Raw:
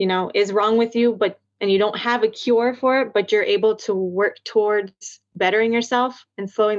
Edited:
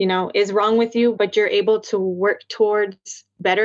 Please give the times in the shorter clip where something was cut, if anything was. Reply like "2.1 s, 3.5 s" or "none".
1.2 s